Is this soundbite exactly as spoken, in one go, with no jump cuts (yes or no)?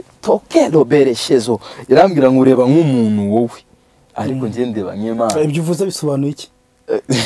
yes